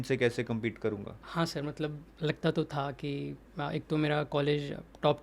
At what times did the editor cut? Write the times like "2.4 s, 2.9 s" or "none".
1.2 s